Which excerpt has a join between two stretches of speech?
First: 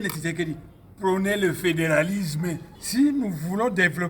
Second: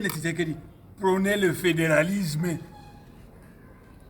first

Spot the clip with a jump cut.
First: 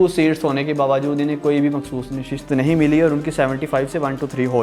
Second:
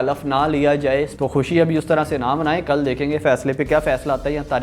second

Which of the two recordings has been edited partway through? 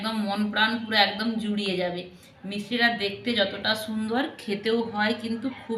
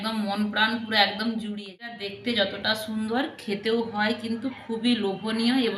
second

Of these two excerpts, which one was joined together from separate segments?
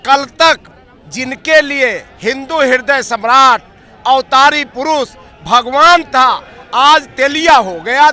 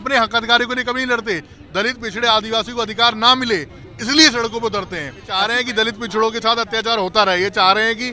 second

